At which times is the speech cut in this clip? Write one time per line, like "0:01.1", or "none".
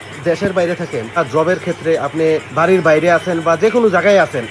0:01.2
0:02.5